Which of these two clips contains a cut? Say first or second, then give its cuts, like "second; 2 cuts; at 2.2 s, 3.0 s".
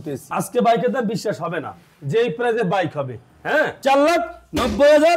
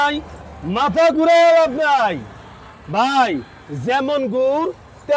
first; 1 cut; at 3.7 s